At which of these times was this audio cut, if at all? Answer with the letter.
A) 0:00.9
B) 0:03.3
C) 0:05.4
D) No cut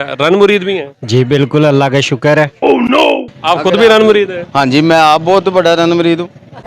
B